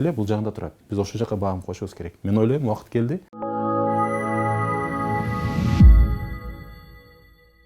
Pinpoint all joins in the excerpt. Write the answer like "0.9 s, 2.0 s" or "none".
3.3 s